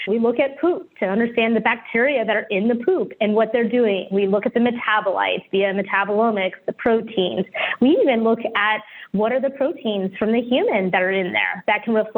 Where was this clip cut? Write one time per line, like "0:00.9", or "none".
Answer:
none